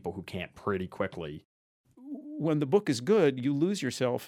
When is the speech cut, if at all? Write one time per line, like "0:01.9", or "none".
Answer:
0:01.6